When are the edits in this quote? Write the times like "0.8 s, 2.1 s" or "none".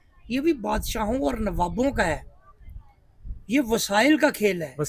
none